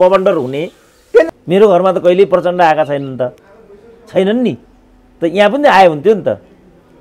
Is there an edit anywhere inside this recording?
yes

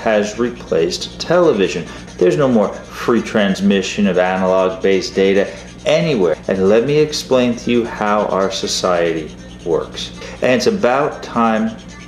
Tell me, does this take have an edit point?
yes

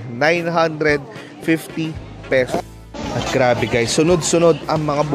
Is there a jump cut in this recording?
yes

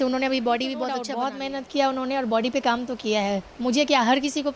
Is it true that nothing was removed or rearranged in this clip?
no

